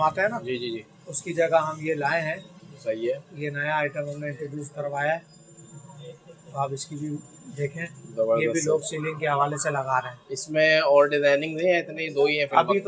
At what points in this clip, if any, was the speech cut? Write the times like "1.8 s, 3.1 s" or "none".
none